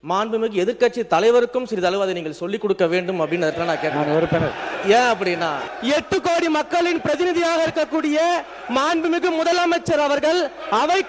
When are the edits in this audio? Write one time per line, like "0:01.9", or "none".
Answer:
0:04.7
0:05.6